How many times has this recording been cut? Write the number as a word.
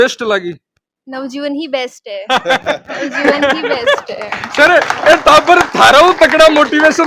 zero